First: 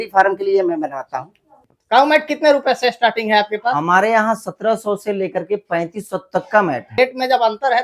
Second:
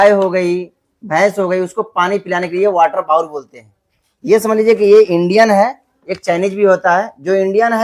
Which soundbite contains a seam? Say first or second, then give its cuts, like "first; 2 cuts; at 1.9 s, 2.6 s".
first; 2 cuts; at 1.3 s, 7.0 s